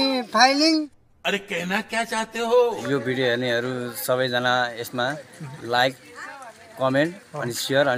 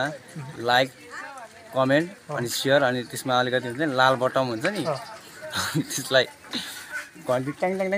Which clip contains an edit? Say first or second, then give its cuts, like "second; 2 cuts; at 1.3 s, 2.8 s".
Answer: first; 2 cuts; at 1.0 s, 2.7 s